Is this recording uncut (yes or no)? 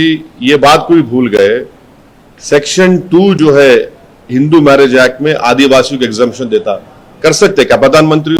yes